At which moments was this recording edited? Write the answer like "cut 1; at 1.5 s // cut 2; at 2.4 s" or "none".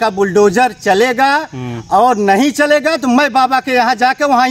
none